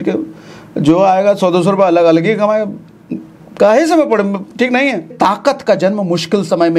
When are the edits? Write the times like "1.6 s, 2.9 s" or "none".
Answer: 5.1 s